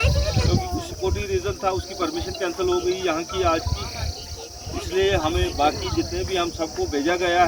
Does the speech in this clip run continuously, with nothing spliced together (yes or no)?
yes